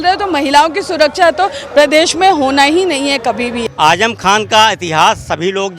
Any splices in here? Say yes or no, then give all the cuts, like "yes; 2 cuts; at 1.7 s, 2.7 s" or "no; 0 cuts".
yes; 1 cut; at 3.6 s